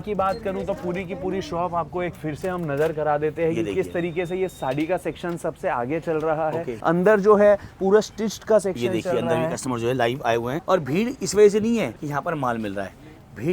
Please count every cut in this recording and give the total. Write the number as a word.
three